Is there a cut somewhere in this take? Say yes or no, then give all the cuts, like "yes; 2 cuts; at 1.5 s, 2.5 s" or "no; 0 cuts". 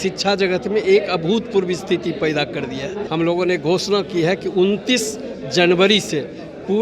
yes; 1 cut; at 3.0 s